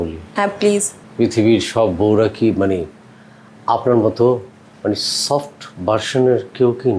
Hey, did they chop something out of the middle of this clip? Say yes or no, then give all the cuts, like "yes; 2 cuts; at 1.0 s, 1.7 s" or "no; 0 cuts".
yes; 1 cut; at 1.0 s